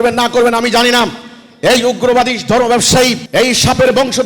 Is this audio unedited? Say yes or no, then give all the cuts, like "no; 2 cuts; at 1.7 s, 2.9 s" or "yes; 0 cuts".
no; 1 cut; at 3.2 s